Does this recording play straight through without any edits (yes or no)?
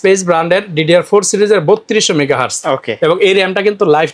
yes